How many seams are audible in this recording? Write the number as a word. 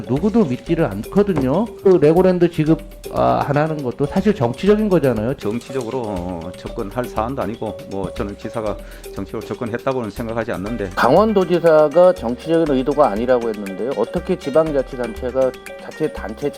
two